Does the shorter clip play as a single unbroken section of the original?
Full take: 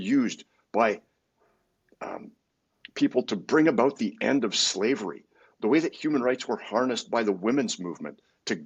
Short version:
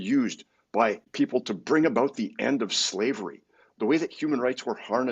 no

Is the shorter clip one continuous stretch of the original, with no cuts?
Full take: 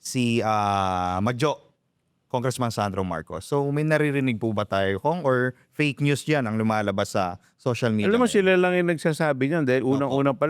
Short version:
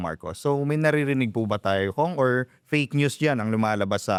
yes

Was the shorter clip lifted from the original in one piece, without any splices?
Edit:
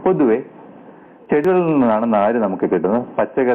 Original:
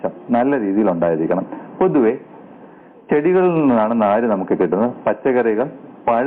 no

